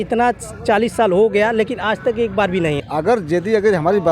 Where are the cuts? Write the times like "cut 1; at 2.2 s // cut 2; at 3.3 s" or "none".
cut 1; at 2.8 s